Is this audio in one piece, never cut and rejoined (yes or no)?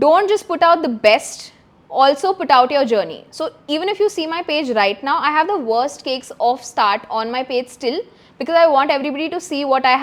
yes